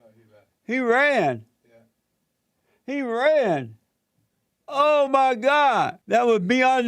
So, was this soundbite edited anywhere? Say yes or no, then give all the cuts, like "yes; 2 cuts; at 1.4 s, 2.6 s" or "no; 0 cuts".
yes; 1 cut; at 6.0 s